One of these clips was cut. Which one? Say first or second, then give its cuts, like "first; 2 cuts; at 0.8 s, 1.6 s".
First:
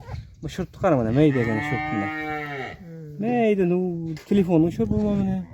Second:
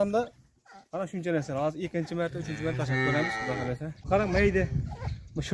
second; 1 cut; at 3.9 s